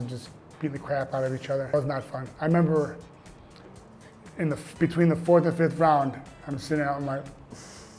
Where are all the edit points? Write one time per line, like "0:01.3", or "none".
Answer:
0:01.7